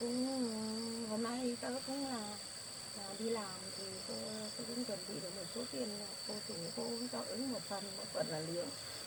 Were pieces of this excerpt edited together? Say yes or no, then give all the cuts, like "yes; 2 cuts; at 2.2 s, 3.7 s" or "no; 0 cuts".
no; 0 cuts